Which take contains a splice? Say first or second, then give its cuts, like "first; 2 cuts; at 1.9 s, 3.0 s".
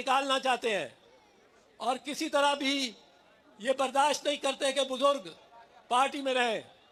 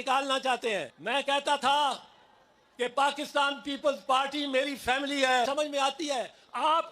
second; 2 cuts; at 0.9 s, 5.5 s